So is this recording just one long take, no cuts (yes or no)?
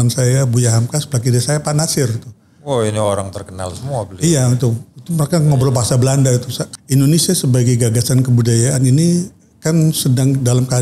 no